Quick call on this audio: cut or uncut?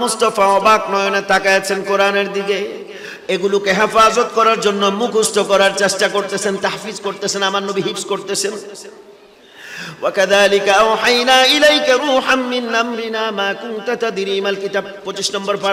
uncut